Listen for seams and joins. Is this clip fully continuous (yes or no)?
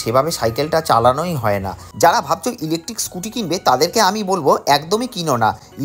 no